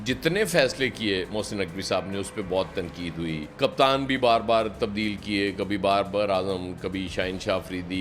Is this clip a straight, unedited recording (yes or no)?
yes